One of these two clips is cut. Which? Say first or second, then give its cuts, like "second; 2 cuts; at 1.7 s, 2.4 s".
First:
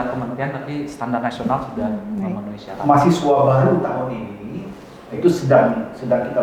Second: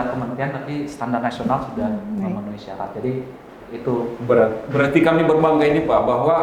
first; 1 cut; at 2.6 s